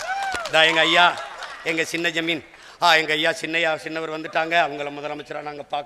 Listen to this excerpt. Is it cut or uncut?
uncut